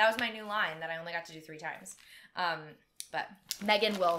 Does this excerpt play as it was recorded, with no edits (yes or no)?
yes